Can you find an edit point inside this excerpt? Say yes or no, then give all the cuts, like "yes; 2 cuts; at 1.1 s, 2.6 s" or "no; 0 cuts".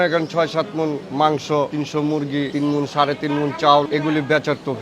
yes; 3 cuts; at 1.0 s, 2.2 s, 3.9 s